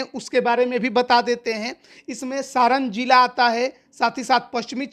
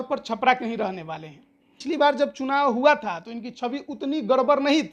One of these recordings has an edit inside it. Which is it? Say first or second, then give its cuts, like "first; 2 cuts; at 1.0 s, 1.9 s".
second; 1 cut; at 1.7 s